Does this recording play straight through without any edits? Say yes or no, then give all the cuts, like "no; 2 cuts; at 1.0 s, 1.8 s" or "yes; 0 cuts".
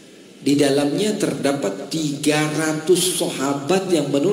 yes; 0 cuts